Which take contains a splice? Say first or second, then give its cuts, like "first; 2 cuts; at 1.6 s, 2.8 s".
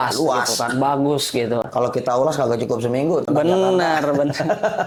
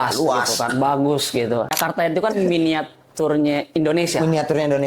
second; 1 cut; at 1.7 s